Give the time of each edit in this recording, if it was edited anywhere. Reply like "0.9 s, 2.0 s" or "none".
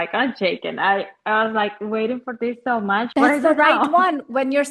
3.1 s